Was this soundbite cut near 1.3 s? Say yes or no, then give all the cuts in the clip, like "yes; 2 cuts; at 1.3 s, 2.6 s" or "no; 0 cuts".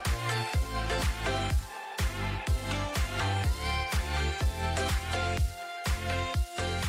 no; 0 cuts